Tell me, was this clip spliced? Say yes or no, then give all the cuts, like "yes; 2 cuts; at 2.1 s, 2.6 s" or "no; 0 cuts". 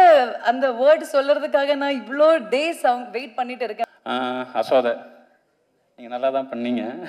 yes; 1 cut; at 3.9 s